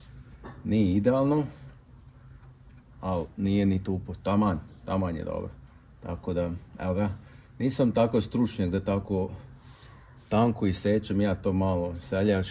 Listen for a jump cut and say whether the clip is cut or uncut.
uncut